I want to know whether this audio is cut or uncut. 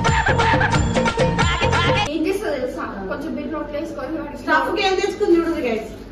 cut